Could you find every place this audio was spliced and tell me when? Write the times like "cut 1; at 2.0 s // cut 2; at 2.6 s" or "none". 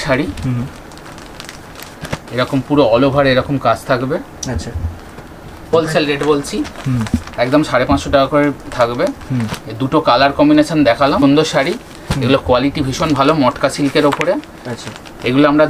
cut 1; at 5.6 s // cut 2; at 11.2 s